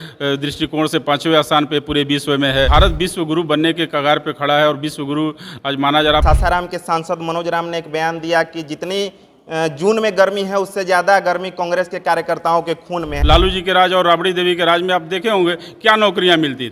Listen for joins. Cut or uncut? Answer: cut